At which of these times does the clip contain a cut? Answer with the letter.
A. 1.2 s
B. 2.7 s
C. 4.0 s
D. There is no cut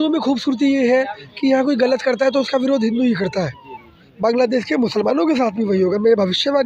C